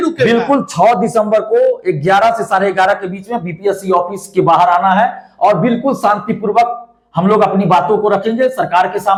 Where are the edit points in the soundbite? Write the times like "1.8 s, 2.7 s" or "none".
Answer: none